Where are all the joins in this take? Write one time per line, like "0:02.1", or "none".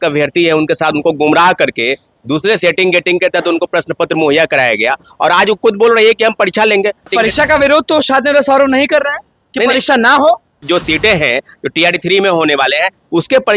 0:07.1
0:10.6